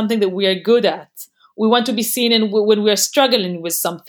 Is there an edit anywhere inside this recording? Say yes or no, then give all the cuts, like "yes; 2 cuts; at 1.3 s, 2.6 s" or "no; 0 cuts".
no; 0 cuts